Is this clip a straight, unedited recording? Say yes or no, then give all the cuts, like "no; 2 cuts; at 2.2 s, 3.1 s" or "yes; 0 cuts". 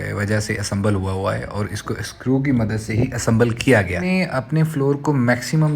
no; 1 cut; at 4.0 s